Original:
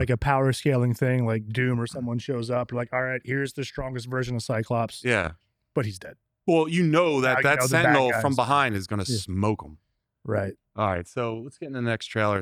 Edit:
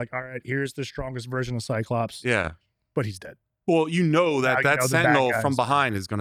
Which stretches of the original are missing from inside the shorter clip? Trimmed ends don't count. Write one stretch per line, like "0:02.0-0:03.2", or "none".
none